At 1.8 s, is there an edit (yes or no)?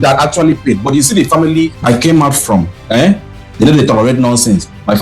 yes